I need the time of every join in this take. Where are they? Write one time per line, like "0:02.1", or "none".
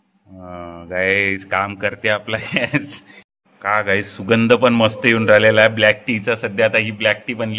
0:03.3